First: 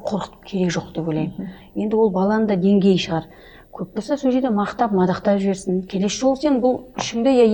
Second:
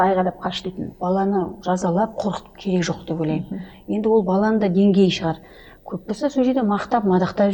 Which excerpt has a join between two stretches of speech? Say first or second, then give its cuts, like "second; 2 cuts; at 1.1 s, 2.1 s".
second; 1 cut; at 0.9 s